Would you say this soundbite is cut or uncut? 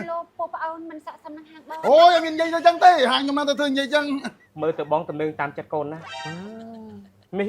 cut